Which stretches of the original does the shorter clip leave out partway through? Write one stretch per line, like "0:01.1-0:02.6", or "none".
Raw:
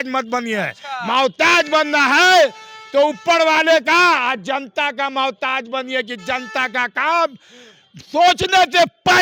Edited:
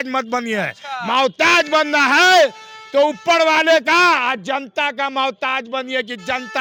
none